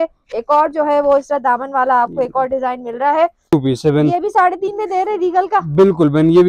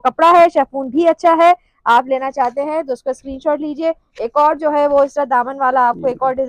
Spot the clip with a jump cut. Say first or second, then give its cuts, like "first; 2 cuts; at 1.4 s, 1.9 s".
first; 1 cut; at 3.5 s